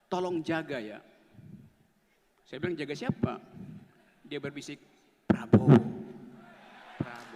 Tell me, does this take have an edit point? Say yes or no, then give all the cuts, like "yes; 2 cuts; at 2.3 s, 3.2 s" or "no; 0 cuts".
no; 0 cuts